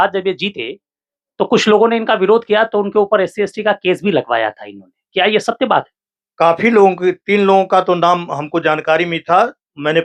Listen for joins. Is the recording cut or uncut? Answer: uncut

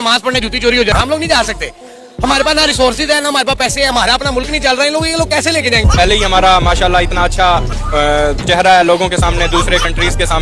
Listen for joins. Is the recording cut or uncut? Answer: cut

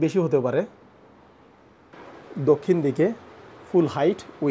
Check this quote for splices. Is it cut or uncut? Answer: cut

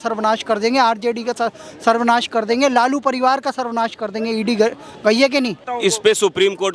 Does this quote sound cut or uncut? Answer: cut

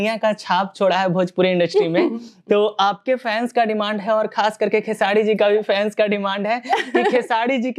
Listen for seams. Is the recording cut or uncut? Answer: uncut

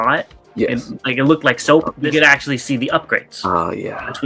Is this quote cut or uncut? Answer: cut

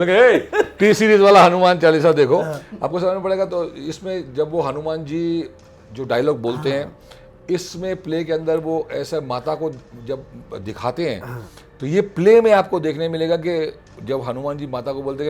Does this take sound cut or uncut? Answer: uncut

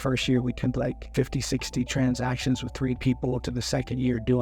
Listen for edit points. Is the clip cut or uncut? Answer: cut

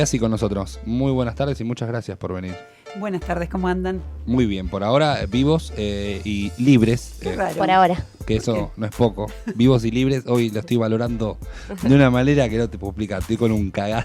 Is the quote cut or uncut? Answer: cut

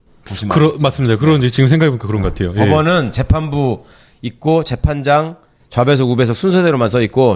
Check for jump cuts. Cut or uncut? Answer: uncut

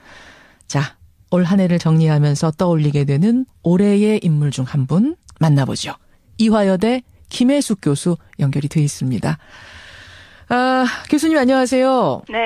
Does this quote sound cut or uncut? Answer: cut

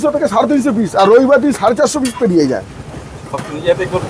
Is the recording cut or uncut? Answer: uncut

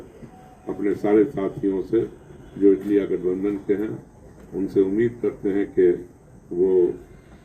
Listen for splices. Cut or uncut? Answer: uncut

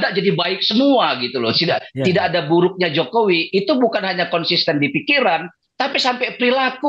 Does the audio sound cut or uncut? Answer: uncut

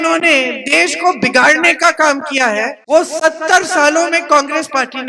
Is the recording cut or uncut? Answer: cut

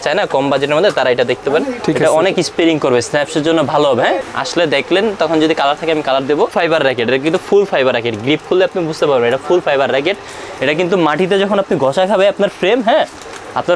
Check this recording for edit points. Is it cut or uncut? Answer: cut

